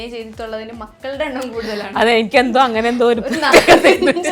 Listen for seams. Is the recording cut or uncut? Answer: uncut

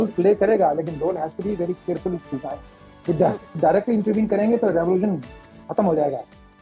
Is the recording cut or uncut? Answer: uncut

